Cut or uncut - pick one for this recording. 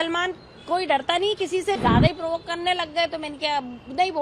cut